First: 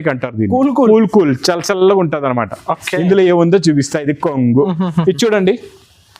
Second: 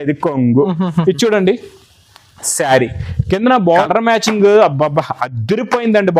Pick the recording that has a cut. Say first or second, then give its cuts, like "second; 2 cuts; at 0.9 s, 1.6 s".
second; 1 cut; at 3.8 s